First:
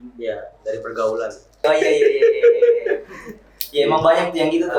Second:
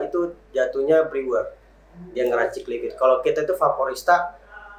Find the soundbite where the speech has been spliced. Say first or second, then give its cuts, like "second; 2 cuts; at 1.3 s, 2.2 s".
first; 1 cut; at 1.6 s